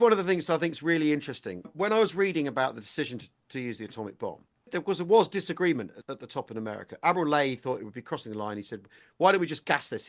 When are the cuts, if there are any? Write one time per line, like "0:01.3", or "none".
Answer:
0:01.7
0:04.7
0:06.0